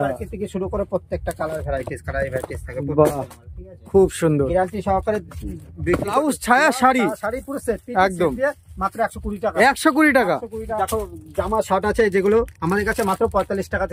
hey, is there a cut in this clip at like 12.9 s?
no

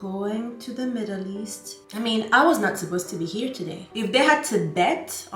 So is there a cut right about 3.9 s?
no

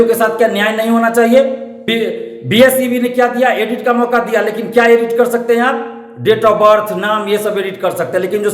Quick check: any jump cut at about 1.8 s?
yes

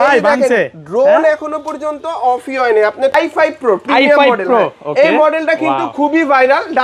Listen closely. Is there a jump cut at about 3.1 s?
yes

